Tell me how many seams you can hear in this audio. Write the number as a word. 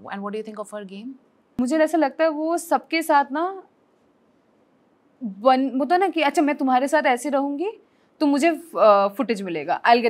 one